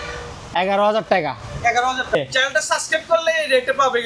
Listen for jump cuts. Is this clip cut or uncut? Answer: cut